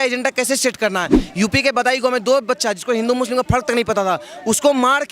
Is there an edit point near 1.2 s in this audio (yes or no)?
yes